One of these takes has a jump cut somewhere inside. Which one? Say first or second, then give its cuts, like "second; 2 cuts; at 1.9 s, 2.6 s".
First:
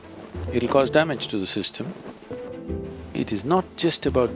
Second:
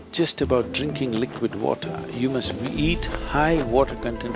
first; 1 cut; at 2.5 s